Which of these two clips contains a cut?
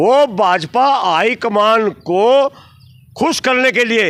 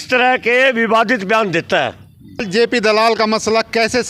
second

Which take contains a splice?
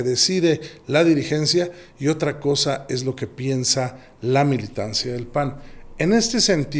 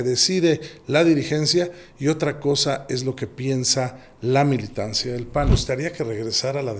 second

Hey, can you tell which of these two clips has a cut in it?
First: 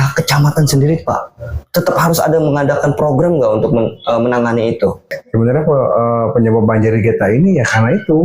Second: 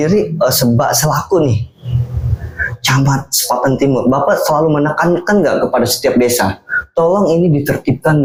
first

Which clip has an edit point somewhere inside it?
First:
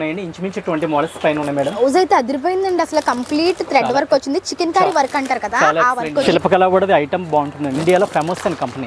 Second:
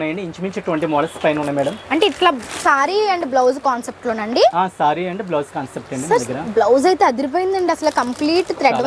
first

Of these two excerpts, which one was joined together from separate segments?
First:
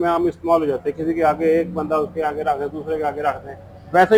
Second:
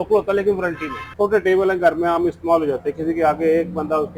second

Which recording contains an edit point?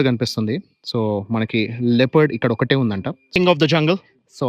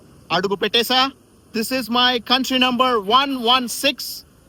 first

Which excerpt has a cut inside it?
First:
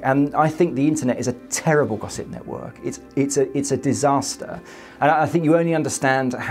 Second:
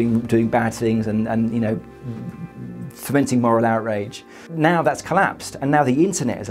second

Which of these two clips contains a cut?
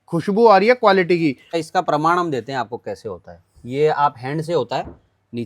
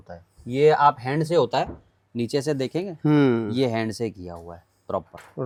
first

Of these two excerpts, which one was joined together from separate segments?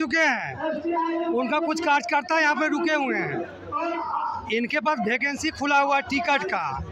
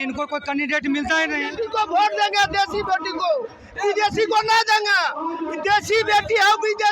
second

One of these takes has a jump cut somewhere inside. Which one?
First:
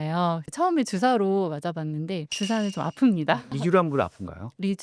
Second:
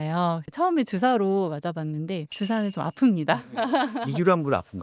first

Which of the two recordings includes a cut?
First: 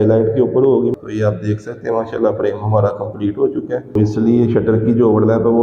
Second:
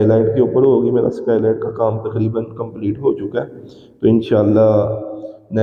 first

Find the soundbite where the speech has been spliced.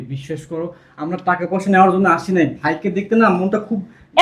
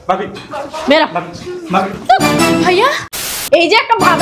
second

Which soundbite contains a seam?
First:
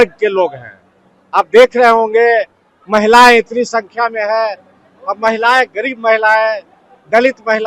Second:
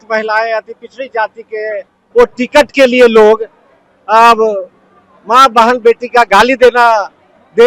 second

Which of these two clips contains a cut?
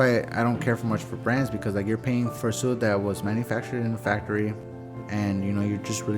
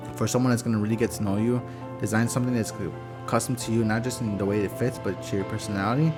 first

